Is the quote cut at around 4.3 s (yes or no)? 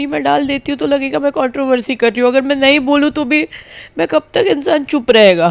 no